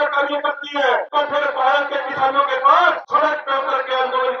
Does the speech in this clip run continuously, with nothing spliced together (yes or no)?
no